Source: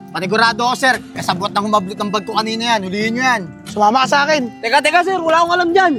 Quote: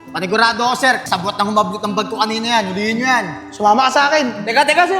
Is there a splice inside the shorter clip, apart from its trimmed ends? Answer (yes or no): yes